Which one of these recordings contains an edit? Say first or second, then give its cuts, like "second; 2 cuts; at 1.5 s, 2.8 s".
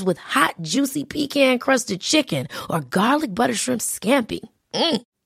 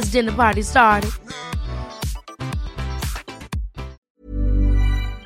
second; 1 cut; at 4.0 s